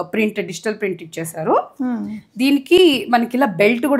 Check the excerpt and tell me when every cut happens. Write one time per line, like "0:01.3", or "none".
none

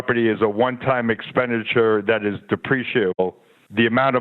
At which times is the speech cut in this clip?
0:03.2

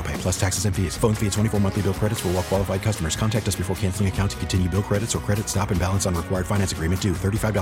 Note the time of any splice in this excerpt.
none

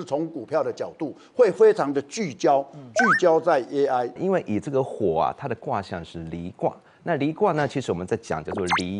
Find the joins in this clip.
0:04.2

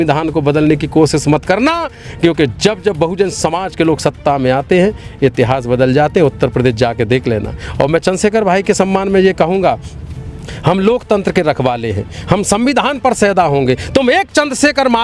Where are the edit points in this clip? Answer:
none

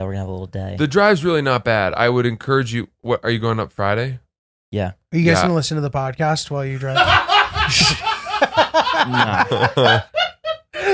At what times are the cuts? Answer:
none

